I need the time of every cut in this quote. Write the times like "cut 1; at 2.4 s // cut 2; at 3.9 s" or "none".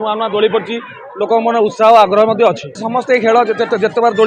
cut 1; at 2.7 s